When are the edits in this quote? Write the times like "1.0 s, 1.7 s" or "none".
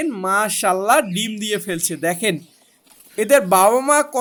none